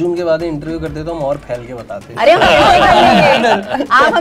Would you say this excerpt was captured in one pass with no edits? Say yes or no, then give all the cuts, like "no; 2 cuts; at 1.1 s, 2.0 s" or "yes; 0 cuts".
yes; 0 cuts